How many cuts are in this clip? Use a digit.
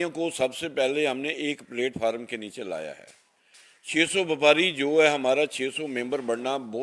0